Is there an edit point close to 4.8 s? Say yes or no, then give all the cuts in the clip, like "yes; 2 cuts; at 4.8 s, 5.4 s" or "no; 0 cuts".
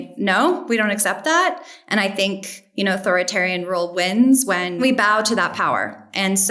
yes; 1 cut; at 4.8 s